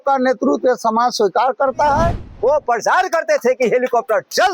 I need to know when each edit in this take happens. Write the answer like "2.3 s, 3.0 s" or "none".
2.2 s